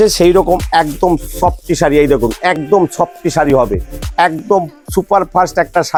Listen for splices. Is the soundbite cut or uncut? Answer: uncut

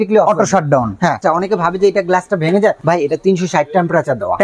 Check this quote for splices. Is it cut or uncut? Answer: cut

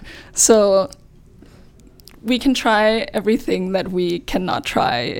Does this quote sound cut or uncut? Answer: uncut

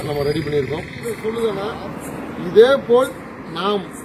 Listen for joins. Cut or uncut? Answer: cut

